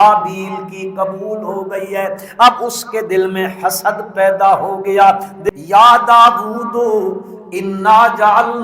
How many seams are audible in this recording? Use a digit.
1